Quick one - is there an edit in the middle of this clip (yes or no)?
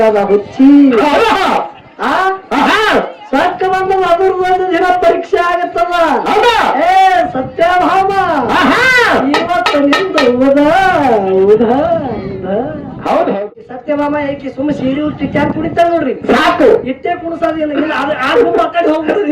yes